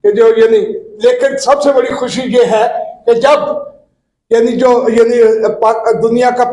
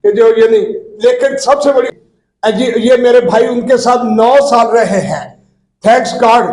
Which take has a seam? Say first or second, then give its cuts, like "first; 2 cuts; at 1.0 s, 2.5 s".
second; 1 cut; at 2.0 s